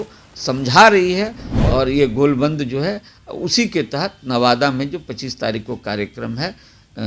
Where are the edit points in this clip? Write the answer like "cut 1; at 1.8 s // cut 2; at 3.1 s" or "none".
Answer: cut 1; at 1.4 s